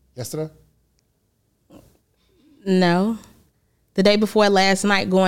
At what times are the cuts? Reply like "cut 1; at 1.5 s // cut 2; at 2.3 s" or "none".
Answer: none

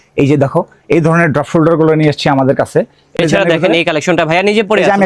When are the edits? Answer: cut 1; at 3.1 s

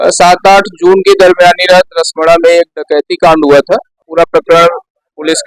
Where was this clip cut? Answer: cut 1; at 4.0 s

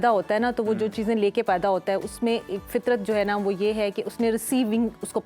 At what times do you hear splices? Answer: none

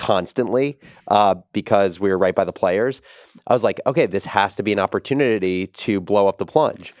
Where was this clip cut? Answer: none

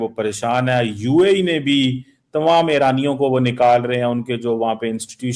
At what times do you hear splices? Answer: none

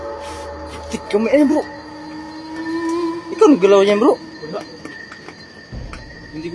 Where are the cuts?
cut 1; at 1.8 s // cut 2; at 3.3 s

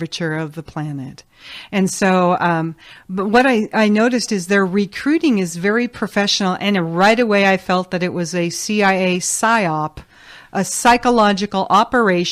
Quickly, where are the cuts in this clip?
cut 1; at 8.7 s

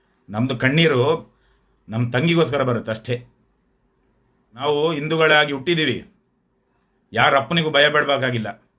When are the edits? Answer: cut 1; at 4.5 s

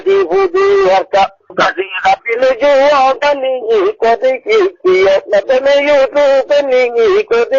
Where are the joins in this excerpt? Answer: none

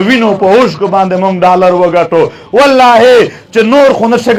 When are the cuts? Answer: none

